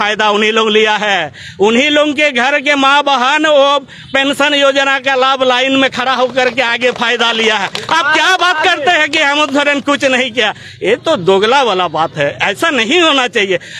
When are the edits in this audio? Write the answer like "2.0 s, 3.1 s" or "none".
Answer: none